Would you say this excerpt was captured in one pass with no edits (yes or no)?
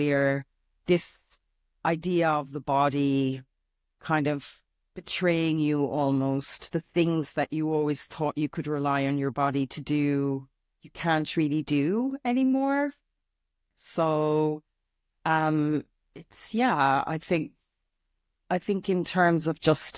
yes